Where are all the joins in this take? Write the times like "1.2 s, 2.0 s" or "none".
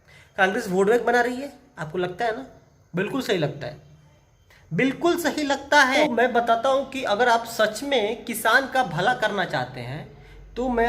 6.0 s